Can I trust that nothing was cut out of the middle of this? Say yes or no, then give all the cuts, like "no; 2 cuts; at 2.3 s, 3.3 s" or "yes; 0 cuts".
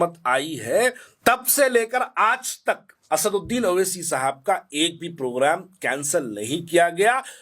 no; 2 cuts; at 1.1 s, 2.9 s